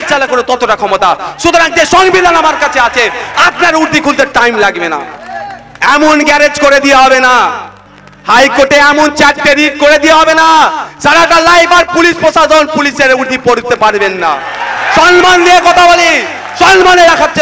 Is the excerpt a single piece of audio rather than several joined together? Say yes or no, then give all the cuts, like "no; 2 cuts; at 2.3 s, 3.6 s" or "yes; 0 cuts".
yes; 0 cuts